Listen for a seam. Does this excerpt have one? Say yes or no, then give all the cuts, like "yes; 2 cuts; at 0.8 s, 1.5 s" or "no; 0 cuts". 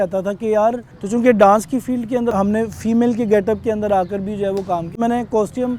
yes; 3 cuts; at 0.9 s, 2.3 s, 5.0 s